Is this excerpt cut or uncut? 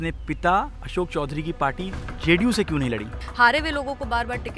cut